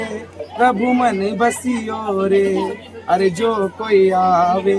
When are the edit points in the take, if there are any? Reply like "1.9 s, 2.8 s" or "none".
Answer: none